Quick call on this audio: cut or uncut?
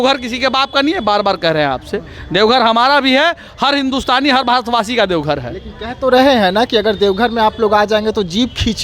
uncut